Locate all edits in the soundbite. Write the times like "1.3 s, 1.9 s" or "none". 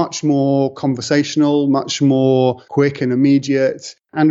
2.6 s